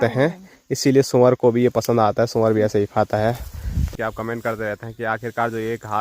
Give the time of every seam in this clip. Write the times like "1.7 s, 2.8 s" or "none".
3.8 s